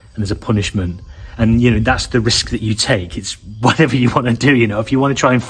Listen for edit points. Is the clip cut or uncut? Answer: uncut